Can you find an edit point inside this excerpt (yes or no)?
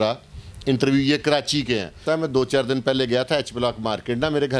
yes